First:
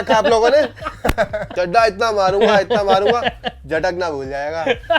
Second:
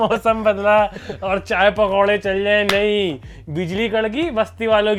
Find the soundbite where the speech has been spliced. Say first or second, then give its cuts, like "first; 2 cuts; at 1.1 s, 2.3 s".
first; 1 cut; at 1.4 s